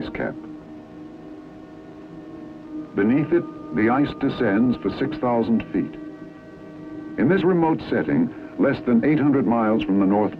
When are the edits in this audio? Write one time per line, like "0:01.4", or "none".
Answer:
0:04.6